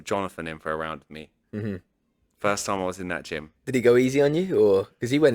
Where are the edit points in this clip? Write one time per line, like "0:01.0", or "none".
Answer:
0:01.3